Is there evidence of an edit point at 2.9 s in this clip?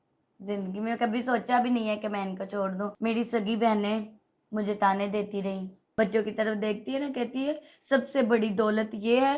yes; 2 cuts; at 2.9 s, 5.8 s

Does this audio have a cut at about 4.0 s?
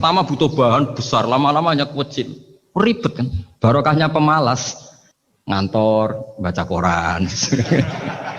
no; 0 cuts

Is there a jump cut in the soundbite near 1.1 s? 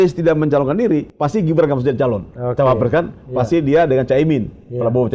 yes; 1 cut; at 1.1 s

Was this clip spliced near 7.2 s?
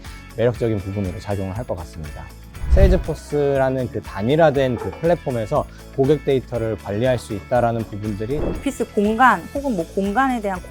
no; 2 cuts; at 2.6 s, 8.5 s

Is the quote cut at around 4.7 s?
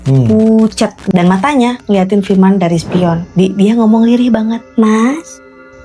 yes; 3 cuts; at 1.0 s, 3.2 s, 4.7 s

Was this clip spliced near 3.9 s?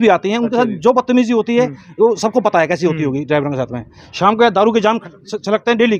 no; 0 cuts

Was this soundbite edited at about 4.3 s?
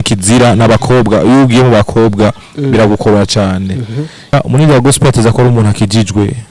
yes; 1 cut; at 4.3 s

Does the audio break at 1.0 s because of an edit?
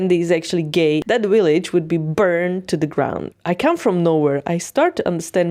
yes; 2 cuts; at 1.0 s, 3.3 s

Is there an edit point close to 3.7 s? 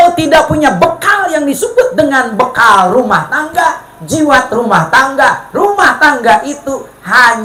no; 0 cuts

